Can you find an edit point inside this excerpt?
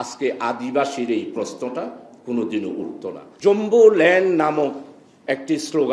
yes; 1 cut; at 3.3 s

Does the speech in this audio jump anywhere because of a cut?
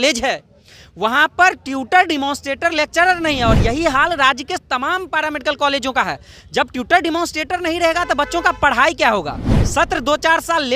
no; 0 cuts

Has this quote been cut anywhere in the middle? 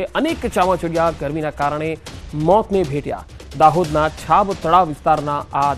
no; 0 cuts

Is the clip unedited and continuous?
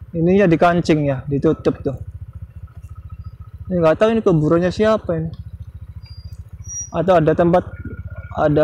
yes; 0 cuts

